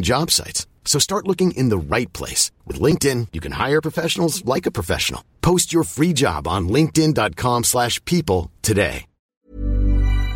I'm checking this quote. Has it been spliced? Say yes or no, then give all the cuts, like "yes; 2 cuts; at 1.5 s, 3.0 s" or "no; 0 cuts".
yes; 1 cut; at 9.4 s